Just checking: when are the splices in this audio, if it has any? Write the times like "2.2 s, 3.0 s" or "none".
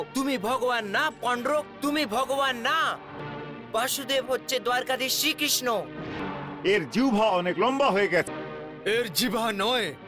3.2 s, 6.2 s, 8.3 s